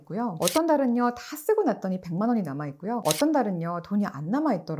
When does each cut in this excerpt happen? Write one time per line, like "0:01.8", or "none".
none